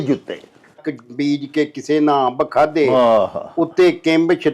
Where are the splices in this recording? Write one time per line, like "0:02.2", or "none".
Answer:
0:00.9